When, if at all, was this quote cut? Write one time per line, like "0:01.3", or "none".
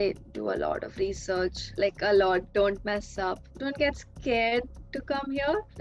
0:01.6
0:03.5

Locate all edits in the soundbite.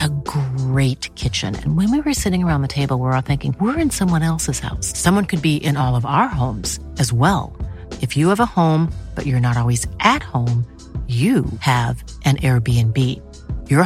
none

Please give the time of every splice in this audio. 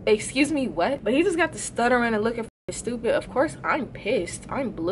0:01.0

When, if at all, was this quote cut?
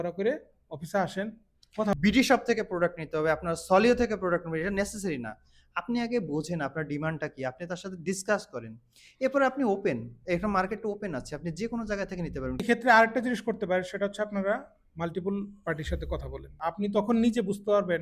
0:01.9
0:12.6
0:16.6

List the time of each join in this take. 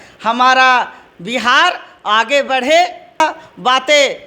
0:03.2

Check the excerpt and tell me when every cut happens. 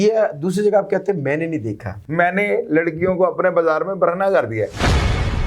0:02.0

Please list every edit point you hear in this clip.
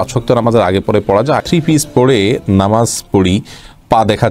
0:01.4

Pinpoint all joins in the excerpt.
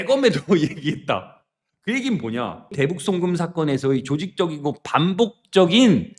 0:02.6

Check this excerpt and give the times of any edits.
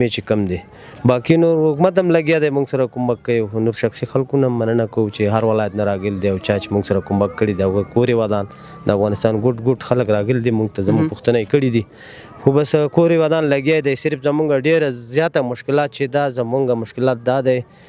none

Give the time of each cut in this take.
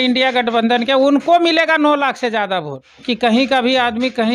0:02.9

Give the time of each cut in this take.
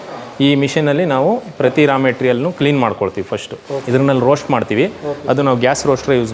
0:03.8

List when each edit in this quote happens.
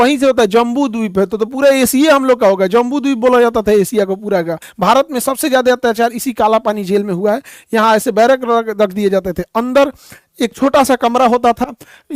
0:04.7

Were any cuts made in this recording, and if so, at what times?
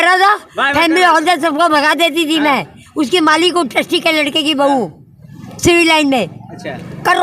none

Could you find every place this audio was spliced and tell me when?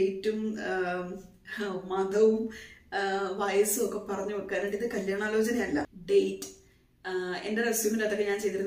0:06.0

